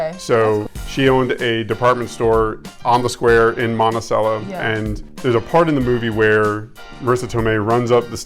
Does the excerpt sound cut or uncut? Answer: cut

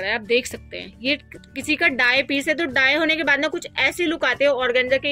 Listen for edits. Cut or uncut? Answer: uncut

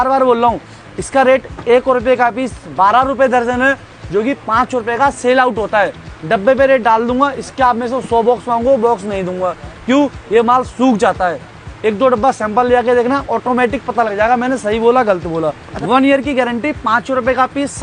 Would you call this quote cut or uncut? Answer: cut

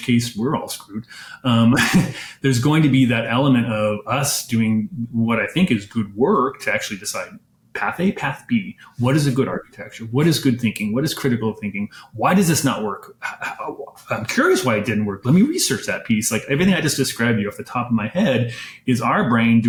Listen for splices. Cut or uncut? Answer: uncut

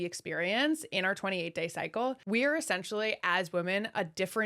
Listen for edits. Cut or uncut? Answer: cut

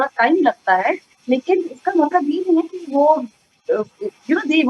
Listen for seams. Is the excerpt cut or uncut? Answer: uncut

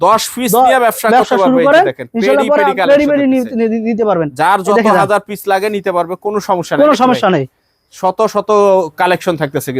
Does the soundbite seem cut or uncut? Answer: uncut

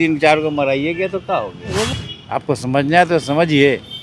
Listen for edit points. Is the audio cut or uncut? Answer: cut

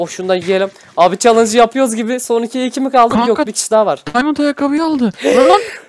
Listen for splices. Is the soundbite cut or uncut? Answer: uncut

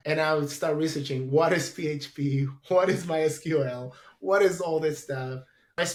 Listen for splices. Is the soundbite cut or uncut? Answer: uncut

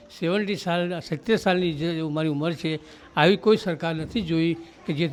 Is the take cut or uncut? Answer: uncut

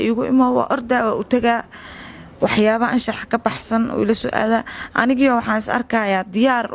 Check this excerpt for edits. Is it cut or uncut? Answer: uncut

